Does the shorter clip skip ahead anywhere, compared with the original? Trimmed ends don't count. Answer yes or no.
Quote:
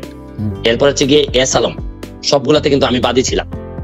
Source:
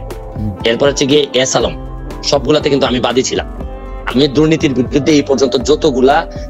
no